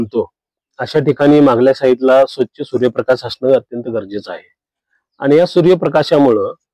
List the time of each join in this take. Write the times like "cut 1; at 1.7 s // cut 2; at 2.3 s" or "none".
none